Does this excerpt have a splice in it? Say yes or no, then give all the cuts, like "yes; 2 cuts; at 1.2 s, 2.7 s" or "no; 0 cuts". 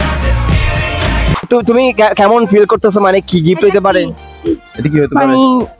yes; 1 cut; at 1.5 s